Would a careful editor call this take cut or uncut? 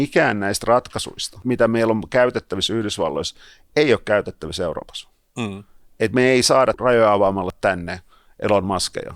cut